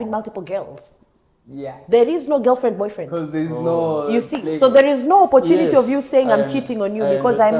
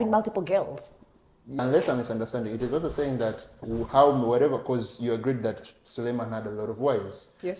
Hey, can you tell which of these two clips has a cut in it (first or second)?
second